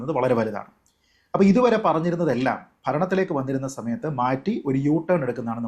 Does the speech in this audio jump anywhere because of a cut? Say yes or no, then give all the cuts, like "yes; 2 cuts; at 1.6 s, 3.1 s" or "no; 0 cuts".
no; 0 cuts